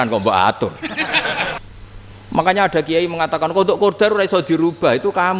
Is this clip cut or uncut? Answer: cut